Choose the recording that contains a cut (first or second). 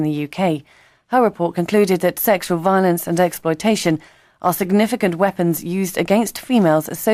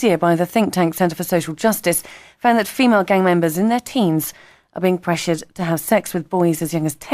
second